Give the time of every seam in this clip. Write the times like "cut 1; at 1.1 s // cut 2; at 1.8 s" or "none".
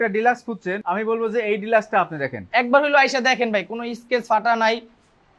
none